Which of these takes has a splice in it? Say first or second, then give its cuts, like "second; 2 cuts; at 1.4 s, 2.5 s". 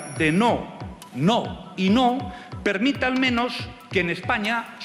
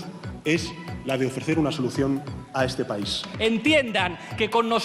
second; 1 cut; at 3.3 s